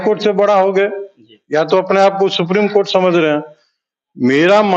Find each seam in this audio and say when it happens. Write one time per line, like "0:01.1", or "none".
none